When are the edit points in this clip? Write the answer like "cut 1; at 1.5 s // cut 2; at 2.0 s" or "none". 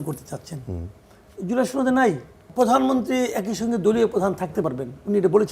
cut 1; at 2.4 s